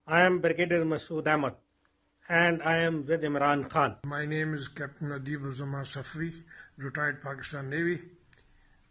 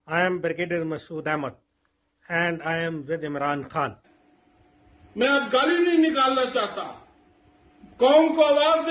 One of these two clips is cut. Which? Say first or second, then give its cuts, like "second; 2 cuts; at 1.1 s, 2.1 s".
second; 1 cut; at 4.2 s